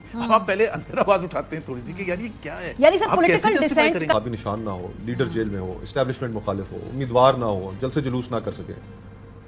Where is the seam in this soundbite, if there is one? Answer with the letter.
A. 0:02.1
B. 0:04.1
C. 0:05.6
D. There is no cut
B